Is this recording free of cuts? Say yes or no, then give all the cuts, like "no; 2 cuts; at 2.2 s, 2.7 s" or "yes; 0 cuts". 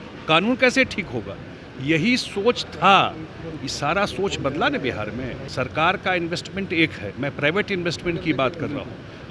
no; 1 cut; at 5.4 s